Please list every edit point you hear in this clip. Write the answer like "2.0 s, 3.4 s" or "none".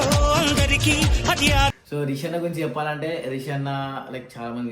1.8 s